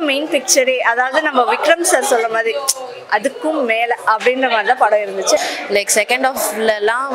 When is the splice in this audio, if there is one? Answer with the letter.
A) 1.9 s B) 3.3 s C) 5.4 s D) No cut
C